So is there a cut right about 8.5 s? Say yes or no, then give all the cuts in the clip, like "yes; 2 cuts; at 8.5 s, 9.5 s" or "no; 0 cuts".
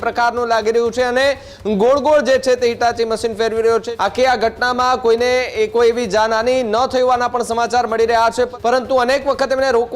yes; 2 cuts; at 3.9 s, 8.5 s